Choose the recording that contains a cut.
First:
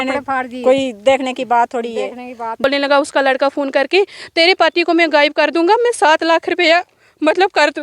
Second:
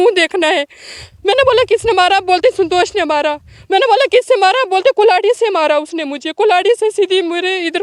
first; 1 cut; at 2.6 s

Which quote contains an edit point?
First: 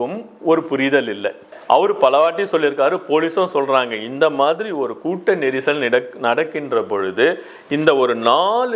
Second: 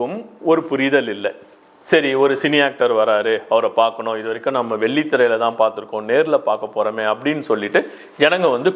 first; 1 cut; at 1.5 s

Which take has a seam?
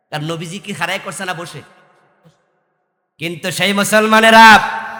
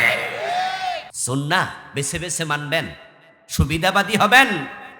second; 1 cut; at 1.1 s

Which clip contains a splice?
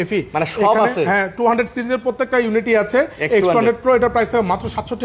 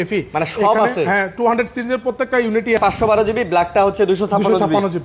second; 1 cut; at 2.8 s

